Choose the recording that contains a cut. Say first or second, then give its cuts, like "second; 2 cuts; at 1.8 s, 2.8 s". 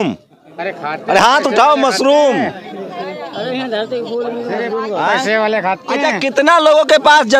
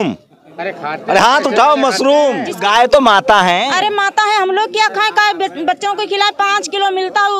second; 1 cut; at 2.5 s